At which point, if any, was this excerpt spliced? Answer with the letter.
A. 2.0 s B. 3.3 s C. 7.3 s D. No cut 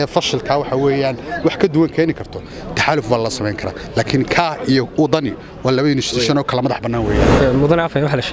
C